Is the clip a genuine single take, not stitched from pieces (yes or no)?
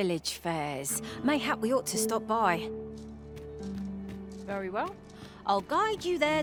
yes